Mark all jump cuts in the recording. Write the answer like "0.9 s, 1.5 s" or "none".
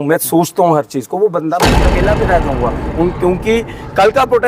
1.8 s